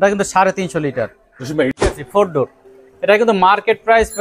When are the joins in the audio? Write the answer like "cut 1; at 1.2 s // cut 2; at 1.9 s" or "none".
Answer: cut 1; at 1.9 s